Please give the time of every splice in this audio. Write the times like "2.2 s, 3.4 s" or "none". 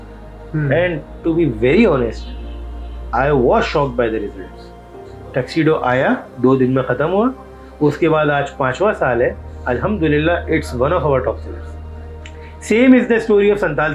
none